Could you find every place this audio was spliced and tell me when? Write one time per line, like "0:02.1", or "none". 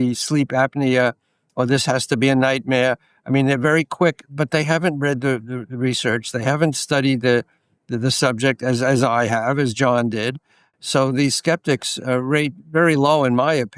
0:10.7